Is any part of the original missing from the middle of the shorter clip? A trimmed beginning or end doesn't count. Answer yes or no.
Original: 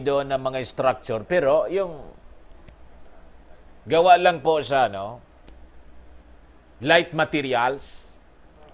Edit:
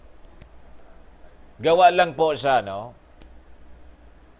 no